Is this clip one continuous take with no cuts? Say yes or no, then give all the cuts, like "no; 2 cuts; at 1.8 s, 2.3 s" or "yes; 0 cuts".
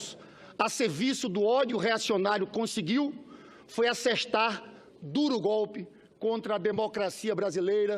no; 1 cut; at 6.7 s